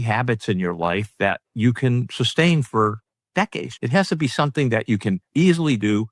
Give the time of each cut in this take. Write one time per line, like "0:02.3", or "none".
0:03.7